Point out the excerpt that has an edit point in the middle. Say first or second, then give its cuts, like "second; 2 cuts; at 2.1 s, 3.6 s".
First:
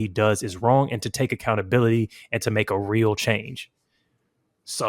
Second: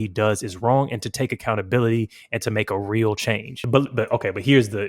second; 1 cut; at 3.6 s